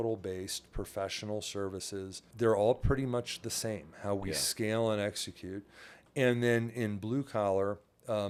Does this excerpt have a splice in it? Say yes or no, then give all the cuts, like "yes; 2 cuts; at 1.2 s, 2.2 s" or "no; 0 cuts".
no; 0 cuts